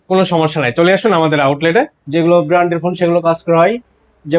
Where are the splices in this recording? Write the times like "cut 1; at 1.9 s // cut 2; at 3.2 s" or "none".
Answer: cut 1; at 2.0 s

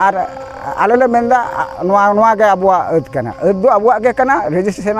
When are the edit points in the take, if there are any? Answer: none

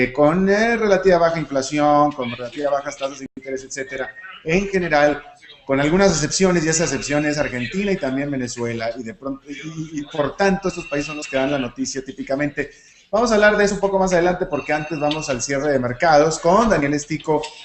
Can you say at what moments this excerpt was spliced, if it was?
cut 1; at 15.5 s

